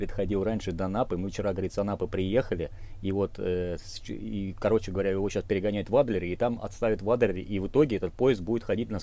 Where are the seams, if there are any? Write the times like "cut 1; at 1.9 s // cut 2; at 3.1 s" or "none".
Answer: none